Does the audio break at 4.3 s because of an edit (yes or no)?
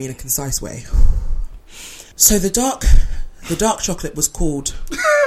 no